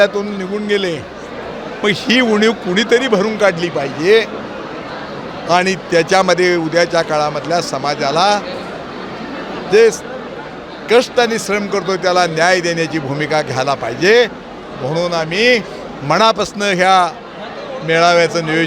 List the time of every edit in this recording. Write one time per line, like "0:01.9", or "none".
none